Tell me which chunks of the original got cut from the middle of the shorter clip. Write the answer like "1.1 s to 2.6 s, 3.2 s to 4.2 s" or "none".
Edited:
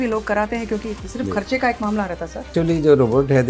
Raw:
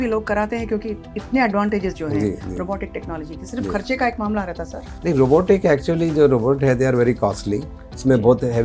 1.0 s to 3.4 s, 4.9 s to 5.8 s